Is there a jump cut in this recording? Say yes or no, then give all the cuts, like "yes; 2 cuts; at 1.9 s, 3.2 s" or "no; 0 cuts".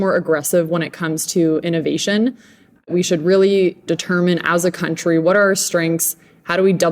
yes; 2 cuts; at 2.9 s, 3.8 s